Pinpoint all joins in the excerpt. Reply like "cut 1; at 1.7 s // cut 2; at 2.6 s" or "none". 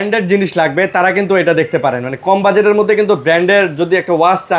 none